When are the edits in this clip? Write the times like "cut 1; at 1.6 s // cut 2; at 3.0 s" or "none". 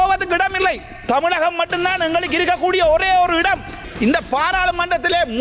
cut 1; at 3.8 s